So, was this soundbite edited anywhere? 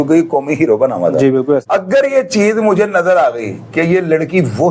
yes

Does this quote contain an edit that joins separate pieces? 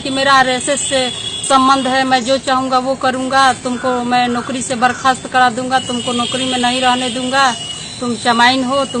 no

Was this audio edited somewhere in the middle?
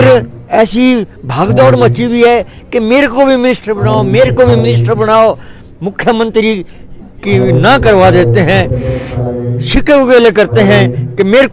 no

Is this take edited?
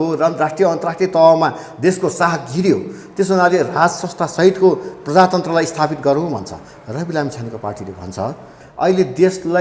yes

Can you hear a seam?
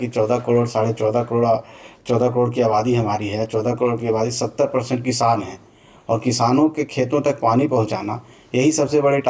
no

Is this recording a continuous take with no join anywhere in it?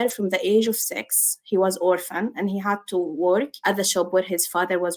yes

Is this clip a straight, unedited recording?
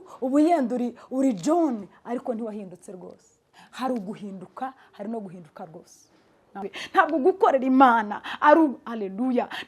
no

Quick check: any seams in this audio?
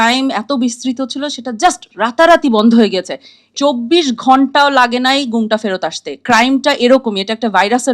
yes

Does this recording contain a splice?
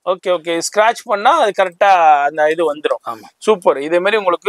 no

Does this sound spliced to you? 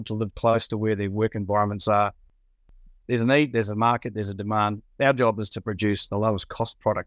yes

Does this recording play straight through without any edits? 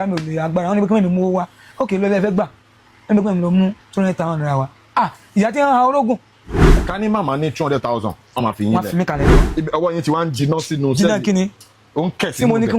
no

